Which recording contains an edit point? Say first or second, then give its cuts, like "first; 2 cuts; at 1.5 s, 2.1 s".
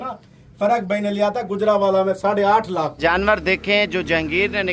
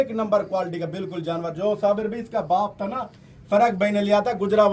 first; 1 cut; at 2.9 s